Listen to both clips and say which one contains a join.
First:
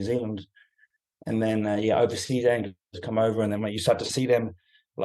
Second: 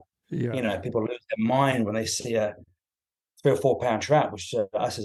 first; 2 cuts; at 2.9 s, 4.1 s

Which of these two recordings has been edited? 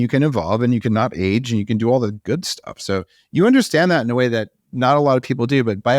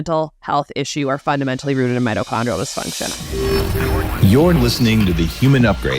second; 1 cut; at 3.0 s

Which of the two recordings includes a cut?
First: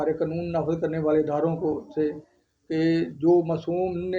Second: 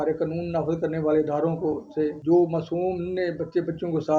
second; 1 cut; at 2.2 s

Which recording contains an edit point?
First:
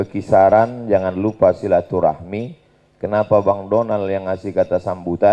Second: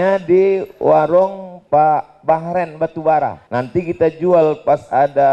second; 2 cuts; at 1.5 s, 3.4 s

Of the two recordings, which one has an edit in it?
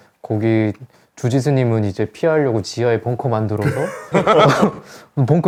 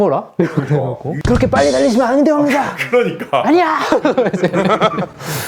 second; 1 cut; at 1.1 s

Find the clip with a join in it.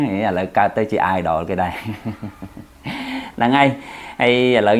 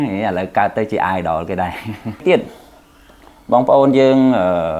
second; 1 cut; at 2.2 s

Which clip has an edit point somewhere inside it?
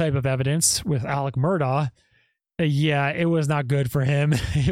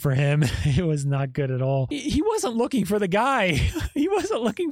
second; 1 cut; at 1.9 s

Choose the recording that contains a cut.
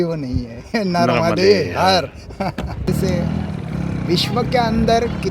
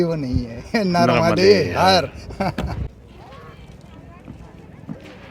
first; 1 cut; at 2.9 s

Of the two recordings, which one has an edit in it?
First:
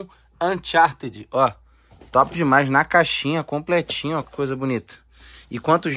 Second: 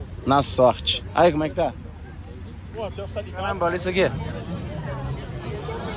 second; 1 cut; at 3.5 s

